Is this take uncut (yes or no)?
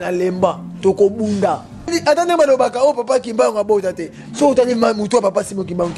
no